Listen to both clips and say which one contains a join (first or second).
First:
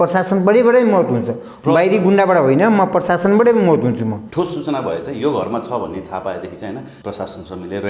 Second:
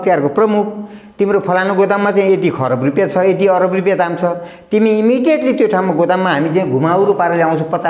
first